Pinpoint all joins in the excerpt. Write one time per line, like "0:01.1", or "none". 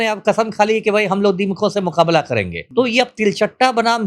0:02.6